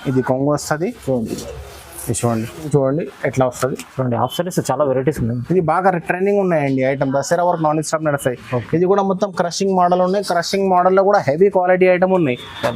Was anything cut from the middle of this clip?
yes; 1 cut; at 2.7 s

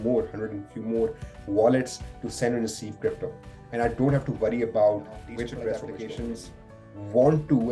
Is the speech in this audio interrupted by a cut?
yes; 1 cut; at 5.7 s

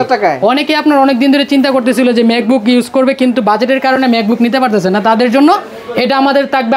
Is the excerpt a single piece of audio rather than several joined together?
yes; 0 cuts

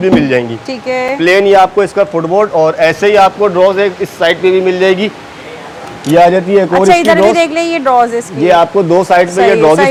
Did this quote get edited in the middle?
no; 0 cuts

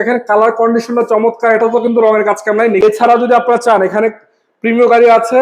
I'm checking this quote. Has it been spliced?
yes; 1 cut; at 2.8 s

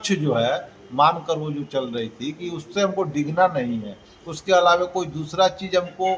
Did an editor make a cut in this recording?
no; 0 cuts

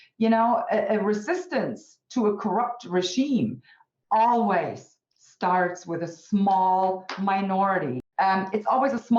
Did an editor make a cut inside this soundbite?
yes; 1 cut; at 8.0 s

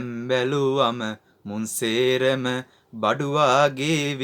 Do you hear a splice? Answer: no; 0 cuts

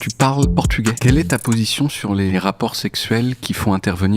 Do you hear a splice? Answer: yes; 2 cuts; at 1.0 s, 2.3 s

